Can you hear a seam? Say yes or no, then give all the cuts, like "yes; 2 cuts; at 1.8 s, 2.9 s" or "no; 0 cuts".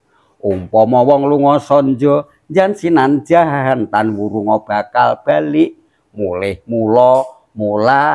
no; 0 cuts